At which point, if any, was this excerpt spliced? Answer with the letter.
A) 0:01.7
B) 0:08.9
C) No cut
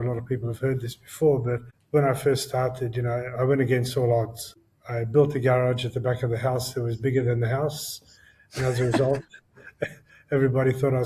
A